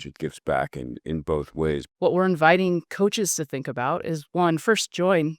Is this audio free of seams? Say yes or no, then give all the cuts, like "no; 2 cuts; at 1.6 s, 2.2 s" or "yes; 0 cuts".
no; 1 cut; at 1.9 s